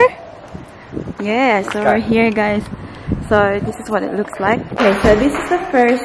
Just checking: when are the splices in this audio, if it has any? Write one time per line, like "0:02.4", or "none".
0:04.7